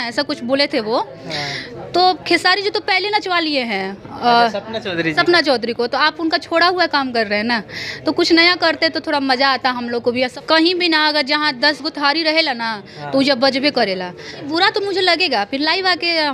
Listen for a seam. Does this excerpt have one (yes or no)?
yes